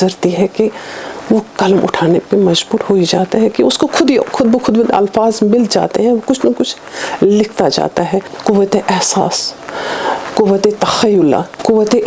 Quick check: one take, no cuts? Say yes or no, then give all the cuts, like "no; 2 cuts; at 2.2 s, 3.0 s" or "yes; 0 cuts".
yes; 0 cuts